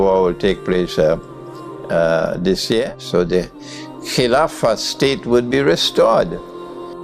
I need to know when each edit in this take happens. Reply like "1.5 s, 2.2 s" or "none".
2.9 s